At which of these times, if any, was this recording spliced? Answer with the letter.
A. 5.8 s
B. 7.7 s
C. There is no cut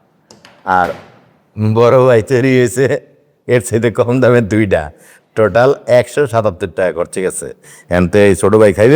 B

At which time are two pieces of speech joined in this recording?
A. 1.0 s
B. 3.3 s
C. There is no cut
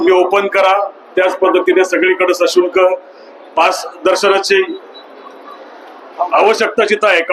C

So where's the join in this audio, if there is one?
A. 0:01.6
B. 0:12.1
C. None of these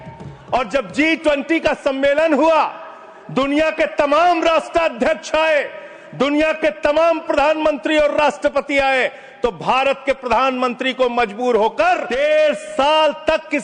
B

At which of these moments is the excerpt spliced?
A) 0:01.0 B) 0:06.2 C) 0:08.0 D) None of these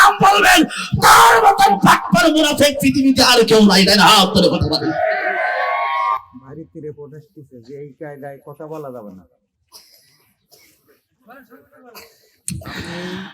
B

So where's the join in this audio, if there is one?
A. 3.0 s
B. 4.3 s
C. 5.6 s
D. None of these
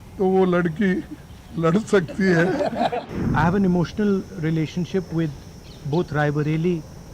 A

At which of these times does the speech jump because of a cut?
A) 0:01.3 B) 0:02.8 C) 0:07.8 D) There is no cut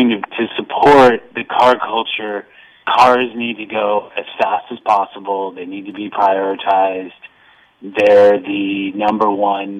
B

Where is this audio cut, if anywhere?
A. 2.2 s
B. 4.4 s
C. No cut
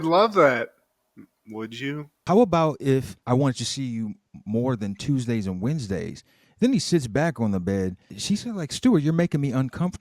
A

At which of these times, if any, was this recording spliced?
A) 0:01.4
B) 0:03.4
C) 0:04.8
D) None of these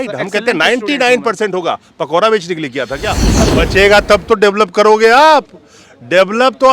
B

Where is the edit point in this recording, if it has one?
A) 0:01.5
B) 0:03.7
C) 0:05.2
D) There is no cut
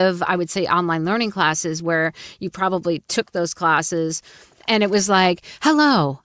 D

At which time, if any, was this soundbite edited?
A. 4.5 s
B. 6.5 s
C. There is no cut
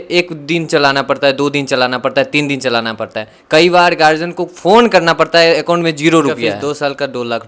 B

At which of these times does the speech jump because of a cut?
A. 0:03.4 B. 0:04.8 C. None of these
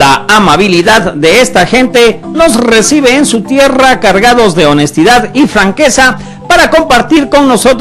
A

